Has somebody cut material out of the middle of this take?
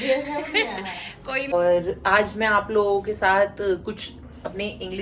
yes; 1 cut; at 1.5 s

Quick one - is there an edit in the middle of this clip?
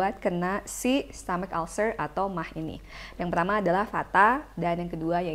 no; 0 cuts

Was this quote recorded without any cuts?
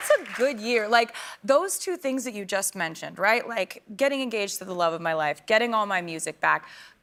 yes; 0 cuts

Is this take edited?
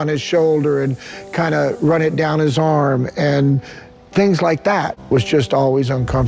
no; 0 cuts

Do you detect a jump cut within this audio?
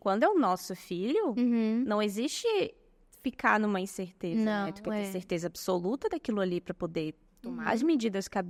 no; 0 cuts

